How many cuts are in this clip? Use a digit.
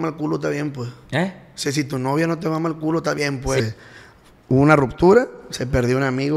1